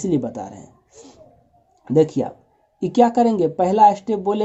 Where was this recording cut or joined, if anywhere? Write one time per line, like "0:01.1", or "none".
none